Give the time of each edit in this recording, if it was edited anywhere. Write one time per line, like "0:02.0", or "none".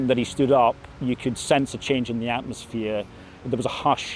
none